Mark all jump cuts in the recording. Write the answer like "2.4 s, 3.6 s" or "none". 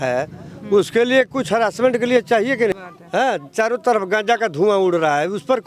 2.7 s